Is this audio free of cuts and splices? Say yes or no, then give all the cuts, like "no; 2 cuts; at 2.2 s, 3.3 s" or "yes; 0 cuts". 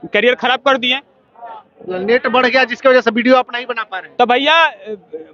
yes; 0 cuts